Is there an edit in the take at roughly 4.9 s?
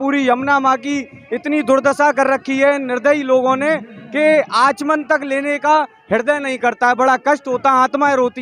no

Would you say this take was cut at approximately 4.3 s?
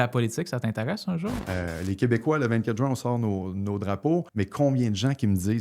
yes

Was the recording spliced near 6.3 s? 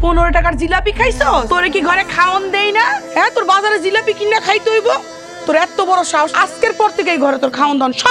yes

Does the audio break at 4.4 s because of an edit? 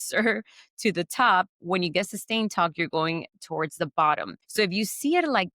yes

